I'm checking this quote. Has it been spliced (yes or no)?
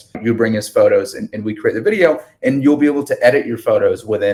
no